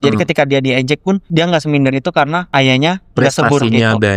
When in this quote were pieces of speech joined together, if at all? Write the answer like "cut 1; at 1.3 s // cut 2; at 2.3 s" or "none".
cut 1; at 1.2 s // cut 2; at 2.4 s